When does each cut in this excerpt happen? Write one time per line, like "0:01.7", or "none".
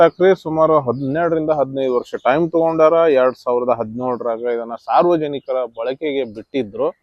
none